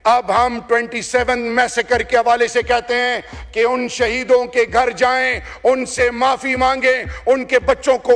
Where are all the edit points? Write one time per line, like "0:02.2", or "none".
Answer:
none